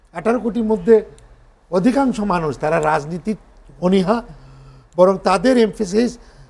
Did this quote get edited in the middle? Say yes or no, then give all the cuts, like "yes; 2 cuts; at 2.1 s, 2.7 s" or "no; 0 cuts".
no; 0 cuts